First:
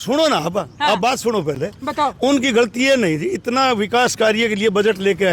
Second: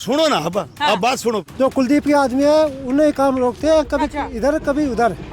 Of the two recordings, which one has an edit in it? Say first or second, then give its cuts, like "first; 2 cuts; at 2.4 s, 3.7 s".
second; 1 cut; at 1.5 s